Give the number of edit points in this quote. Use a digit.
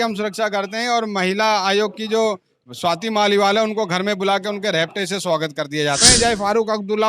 1